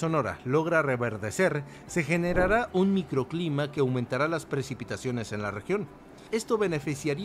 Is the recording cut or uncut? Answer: uncut